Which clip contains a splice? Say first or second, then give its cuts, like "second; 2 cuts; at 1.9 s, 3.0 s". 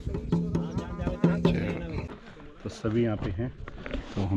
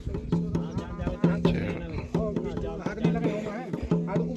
first; 1 cut; at 2.1 s